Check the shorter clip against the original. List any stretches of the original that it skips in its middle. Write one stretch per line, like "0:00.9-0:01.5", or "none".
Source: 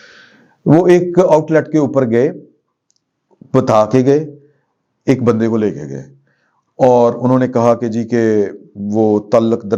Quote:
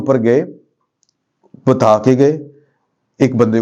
none